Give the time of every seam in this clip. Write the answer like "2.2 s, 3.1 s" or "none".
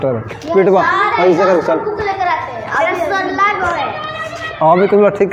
none